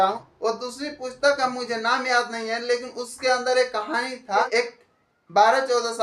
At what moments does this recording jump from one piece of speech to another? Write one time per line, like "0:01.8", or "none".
0:04.4